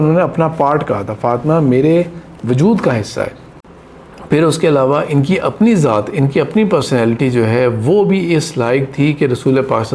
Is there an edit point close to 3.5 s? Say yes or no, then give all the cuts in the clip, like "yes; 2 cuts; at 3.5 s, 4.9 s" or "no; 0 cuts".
yes; 1 cut; at 3.5 s